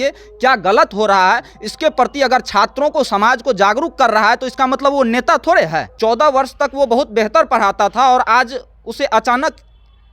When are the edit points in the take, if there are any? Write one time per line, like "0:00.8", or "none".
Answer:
0:05.9